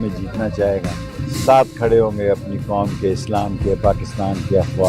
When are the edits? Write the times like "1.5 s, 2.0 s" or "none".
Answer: 1.1 s